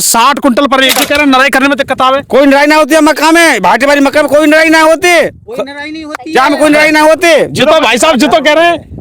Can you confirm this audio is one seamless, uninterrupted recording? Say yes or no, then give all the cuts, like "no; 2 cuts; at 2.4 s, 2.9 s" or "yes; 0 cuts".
no; 1 cut; at 1.0 s